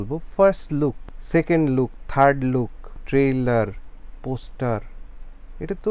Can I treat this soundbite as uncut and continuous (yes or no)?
no